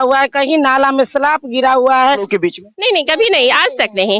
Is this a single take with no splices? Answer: no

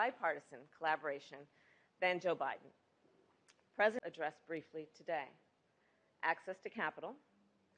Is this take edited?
no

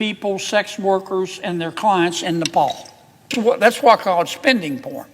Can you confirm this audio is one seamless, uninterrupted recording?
no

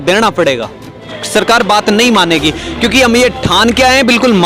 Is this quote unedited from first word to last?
no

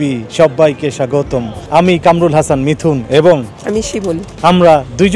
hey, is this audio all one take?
no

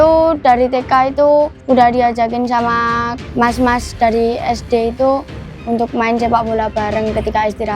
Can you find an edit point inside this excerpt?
yes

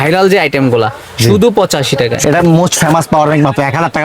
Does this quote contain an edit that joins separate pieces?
yes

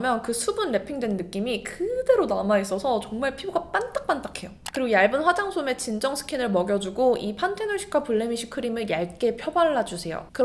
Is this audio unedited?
yes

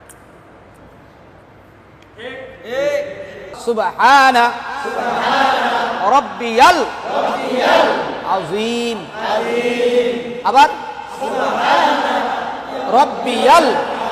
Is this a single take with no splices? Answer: no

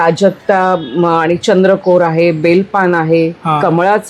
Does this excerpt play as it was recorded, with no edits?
yes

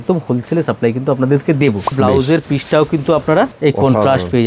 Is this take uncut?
no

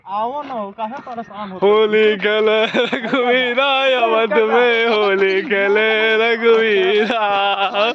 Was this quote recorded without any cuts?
yes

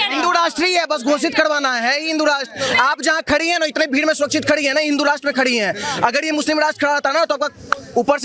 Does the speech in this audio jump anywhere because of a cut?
no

